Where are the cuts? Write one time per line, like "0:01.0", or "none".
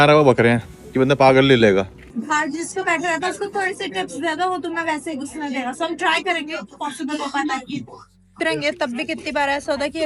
0:02.0
0:08.4